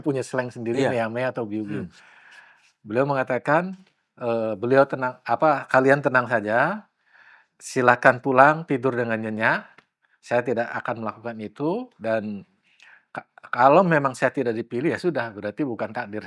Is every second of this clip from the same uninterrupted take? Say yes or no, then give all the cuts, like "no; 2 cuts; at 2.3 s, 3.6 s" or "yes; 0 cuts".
yes; 0 cuts